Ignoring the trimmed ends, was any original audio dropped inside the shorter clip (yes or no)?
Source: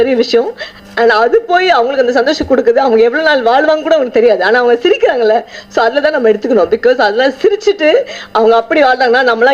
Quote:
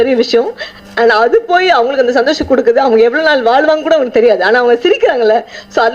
no